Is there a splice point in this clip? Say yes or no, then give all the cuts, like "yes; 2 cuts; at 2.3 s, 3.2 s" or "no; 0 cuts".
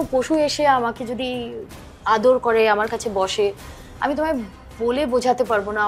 no; 0 cuts